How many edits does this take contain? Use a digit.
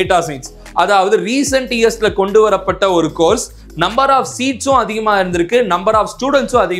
0